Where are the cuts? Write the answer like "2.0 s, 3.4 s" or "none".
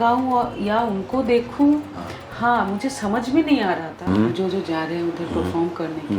3.9 s